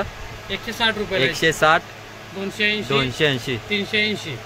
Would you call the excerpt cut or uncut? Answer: uncut